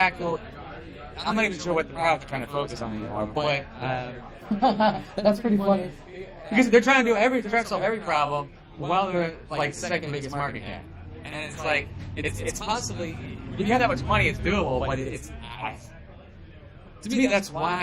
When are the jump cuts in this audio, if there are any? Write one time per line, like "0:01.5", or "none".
none